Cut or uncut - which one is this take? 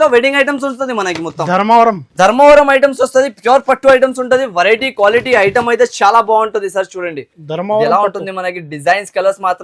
uncut